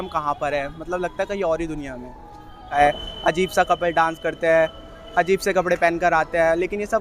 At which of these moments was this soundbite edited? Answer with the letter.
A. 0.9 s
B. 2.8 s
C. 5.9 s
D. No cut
B